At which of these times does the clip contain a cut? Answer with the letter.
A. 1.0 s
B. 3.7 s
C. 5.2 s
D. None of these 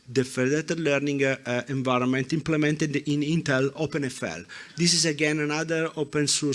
B